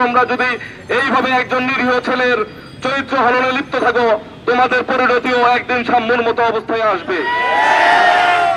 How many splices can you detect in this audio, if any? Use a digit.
0